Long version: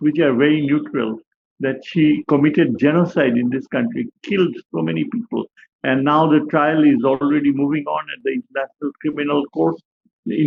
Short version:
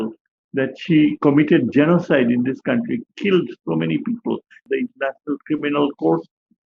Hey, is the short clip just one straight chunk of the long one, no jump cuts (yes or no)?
no